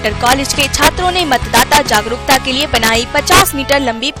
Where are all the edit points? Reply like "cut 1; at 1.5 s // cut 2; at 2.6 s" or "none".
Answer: none